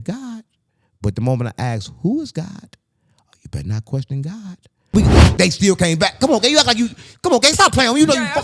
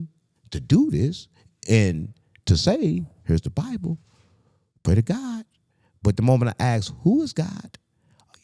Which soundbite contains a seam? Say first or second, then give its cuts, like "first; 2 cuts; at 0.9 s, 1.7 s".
first; 1 cut; at 4.9 s